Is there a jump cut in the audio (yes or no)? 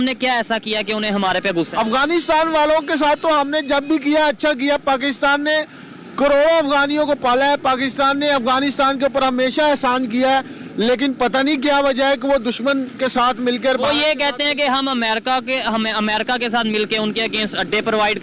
no